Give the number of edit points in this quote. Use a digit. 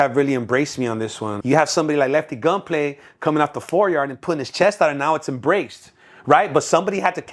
1